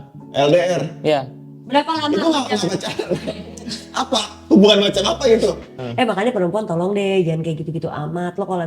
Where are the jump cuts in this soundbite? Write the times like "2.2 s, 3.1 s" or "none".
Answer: 5.7 s

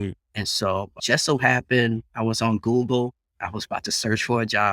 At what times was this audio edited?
1.0 s

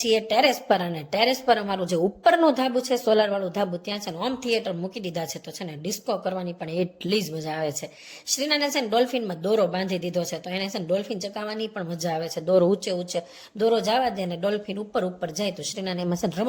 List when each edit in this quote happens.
none

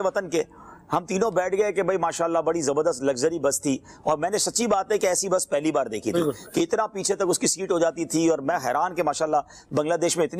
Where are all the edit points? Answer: none

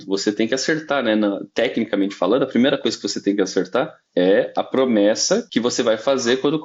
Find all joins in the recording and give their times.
4.0 s, 5.5 s

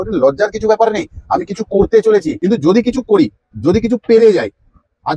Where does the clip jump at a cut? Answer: 2.3 s

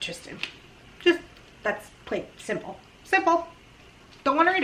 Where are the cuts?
none

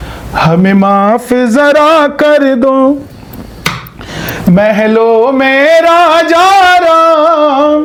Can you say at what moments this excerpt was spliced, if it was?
none

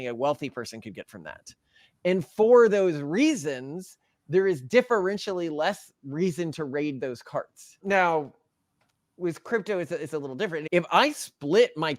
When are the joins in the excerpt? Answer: 7.6 s, 10.6 s

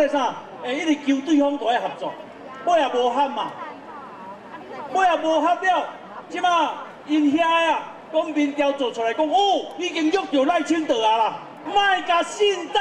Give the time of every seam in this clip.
11.5 s

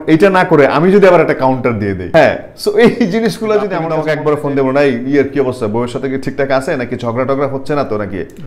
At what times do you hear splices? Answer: 3.9 s

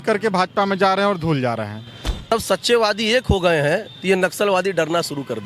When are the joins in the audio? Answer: 2.3 s

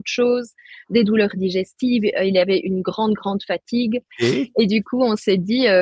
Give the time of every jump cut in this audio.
4.1 s

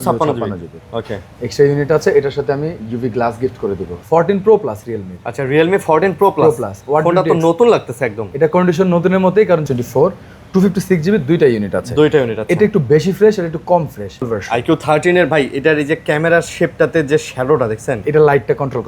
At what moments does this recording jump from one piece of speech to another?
3.9 s, 9.6 s, 14.3 s

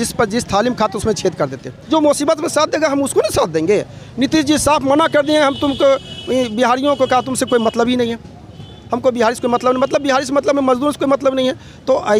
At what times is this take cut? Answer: 1.7 s

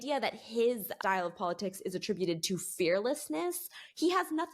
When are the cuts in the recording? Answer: 0.9 s

